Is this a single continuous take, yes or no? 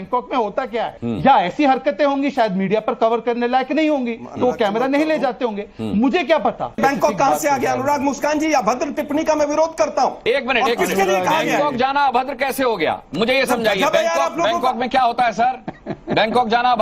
no